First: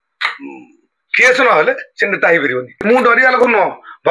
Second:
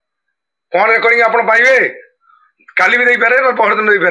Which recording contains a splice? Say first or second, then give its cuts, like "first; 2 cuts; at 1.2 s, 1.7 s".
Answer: first; 1 cut; at 2.8 s